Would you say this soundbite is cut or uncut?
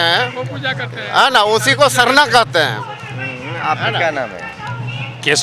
uncut